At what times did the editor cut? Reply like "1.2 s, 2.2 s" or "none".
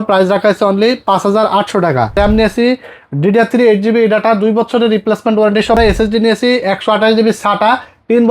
2.2 s, 5.8 s